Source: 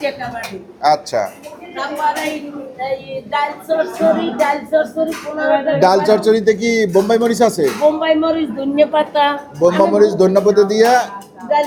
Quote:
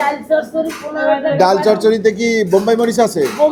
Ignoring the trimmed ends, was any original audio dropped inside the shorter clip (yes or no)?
no